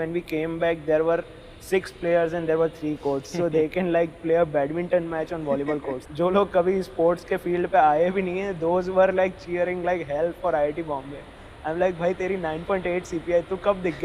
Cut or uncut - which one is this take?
cut